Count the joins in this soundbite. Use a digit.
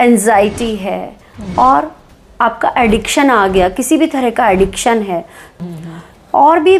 1